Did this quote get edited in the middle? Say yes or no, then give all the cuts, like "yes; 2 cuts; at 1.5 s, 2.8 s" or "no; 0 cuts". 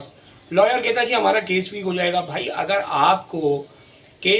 no; 0 cuts